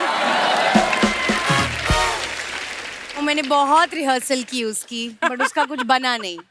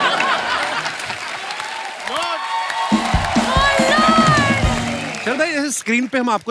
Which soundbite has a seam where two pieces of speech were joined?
second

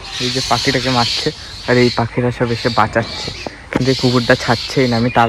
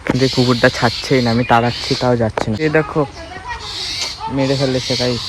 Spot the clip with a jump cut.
second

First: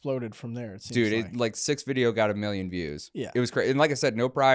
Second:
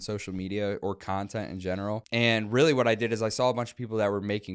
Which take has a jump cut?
second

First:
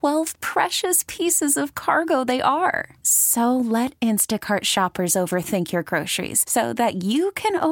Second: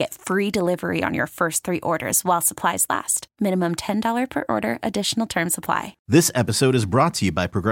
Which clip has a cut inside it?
second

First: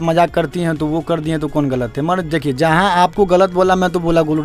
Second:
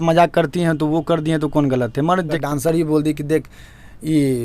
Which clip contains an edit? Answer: second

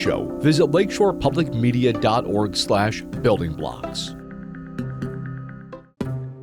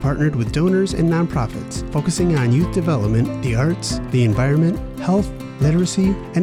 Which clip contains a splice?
first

